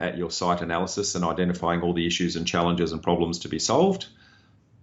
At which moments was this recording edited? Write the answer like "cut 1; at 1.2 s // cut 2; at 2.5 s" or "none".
none